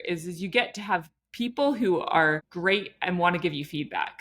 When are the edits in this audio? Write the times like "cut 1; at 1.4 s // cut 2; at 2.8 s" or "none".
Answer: cut 1; at 2.5 s